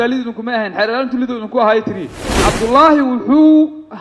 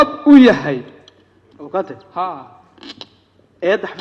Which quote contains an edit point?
first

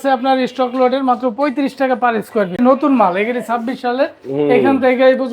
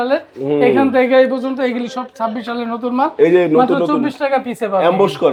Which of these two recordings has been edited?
first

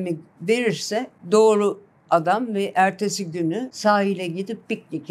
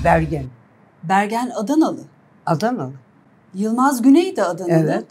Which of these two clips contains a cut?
first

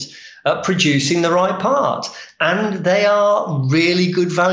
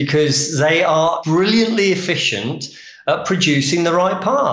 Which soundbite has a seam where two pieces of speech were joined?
second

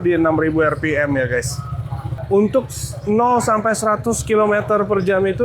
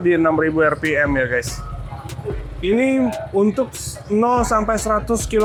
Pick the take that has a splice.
first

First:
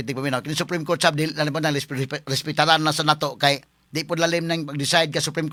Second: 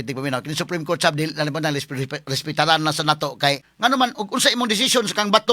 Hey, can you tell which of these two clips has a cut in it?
second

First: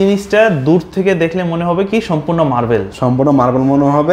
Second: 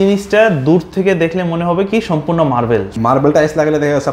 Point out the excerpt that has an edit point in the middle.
second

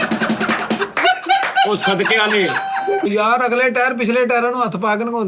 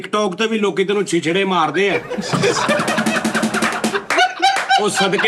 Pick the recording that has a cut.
first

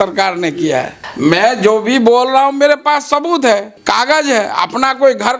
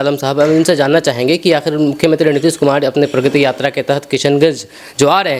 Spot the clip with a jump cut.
first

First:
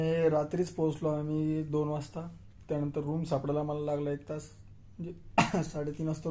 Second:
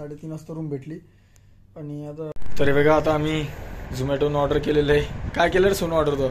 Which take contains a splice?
second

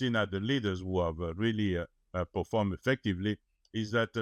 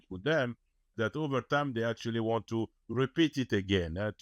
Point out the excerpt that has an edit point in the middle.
second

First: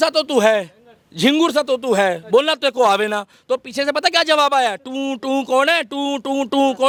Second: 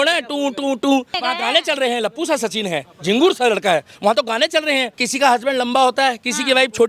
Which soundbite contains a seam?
second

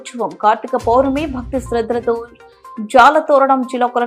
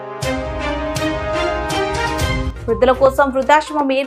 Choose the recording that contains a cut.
second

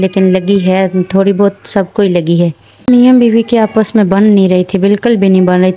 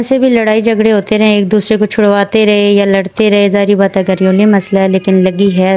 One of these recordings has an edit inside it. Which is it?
first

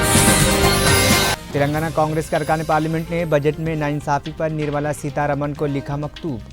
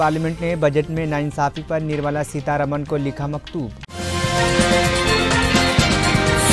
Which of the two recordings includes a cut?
first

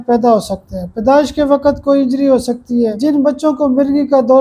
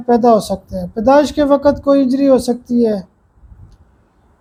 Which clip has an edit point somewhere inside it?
first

